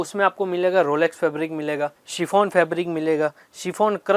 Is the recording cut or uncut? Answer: cut